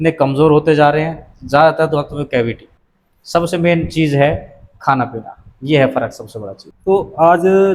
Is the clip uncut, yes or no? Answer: yes